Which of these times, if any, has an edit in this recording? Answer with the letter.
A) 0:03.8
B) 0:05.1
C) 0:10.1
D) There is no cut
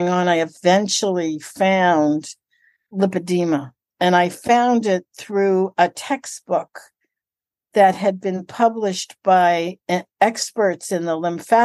A